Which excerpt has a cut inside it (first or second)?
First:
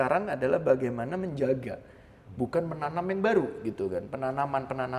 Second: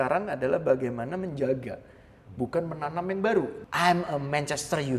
second